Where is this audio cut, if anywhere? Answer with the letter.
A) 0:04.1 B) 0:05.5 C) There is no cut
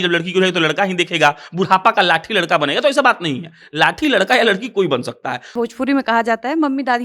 B